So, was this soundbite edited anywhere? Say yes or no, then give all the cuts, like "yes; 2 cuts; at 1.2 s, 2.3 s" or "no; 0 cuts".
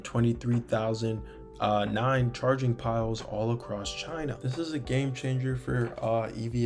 yes; 1 cut; at 4.4 s